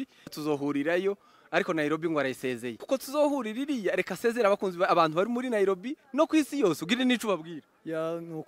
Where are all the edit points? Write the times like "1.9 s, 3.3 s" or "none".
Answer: none